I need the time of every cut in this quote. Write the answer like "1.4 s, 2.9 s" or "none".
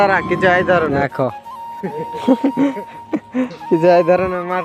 1.0 s